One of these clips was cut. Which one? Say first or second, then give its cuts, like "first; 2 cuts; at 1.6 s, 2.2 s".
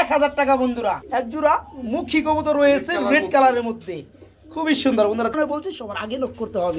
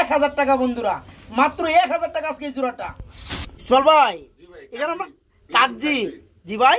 first; 2 cuts; at 1.0 s, 5.3 s